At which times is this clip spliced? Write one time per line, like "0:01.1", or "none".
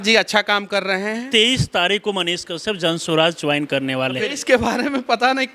0:01.2
0:04.2